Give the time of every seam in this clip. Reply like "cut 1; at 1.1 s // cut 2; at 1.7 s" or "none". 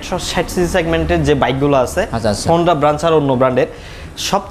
none